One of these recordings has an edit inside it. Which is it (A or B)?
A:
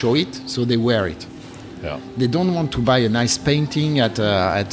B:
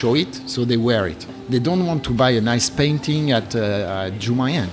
B